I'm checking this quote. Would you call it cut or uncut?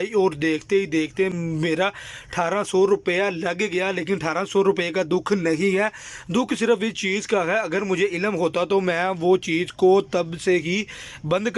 uncut